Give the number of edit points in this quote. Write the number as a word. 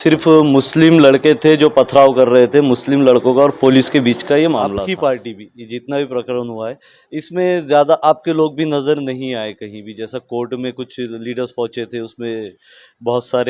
one